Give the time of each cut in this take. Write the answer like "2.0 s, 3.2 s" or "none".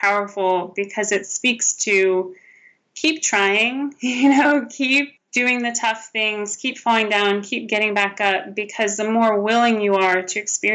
5.2 s